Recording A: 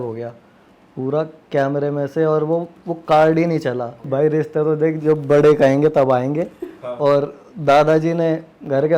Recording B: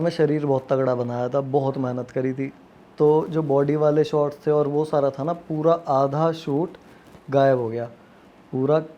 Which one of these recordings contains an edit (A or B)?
A